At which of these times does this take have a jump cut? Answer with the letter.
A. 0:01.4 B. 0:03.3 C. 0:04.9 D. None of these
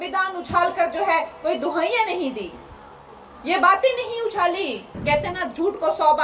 C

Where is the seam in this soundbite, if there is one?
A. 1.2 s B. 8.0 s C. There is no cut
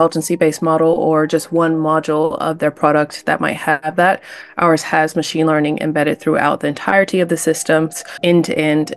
B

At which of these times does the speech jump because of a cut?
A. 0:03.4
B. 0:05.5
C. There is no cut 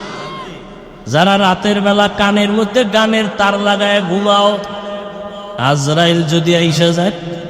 B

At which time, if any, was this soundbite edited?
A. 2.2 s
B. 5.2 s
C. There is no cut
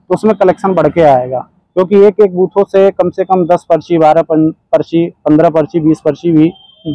C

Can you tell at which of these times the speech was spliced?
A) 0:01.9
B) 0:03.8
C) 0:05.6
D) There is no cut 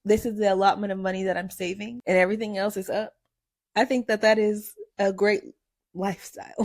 A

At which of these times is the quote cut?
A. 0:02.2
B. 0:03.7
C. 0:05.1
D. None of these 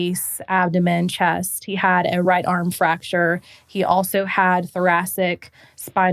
A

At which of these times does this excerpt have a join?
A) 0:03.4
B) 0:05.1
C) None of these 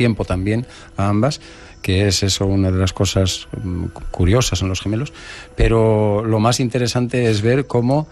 A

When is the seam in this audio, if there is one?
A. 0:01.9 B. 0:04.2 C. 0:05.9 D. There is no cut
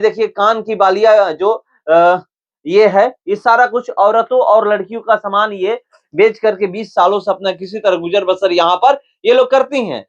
D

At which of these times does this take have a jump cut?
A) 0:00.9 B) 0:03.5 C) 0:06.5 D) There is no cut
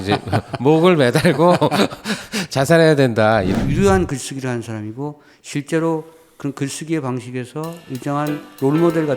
B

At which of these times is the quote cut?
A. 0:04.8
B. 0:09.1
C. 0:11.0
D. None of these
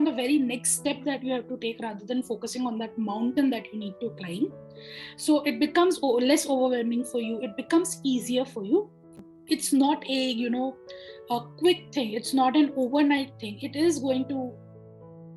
B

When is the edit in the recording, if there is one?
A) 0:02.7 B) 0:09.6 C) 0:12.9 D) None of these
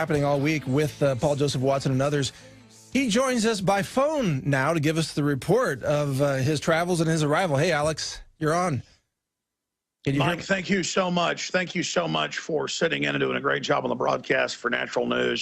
B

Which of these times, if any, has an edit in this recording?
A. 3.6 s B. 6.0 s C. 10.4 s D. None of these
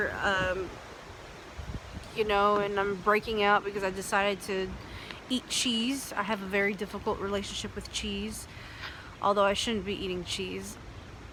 D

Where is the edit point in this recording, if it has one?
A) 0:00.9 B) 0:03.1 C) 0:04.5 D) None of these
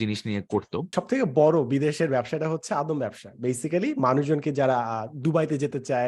A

